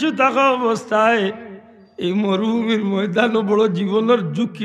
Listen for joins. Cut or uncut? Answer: uncut